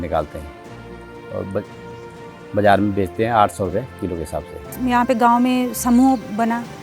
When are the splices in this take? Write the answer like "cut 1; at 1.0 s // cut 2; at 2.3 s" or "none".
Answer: cut 1; at 4.7 s